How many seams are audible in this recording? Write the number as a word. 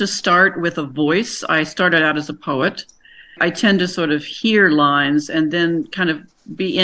one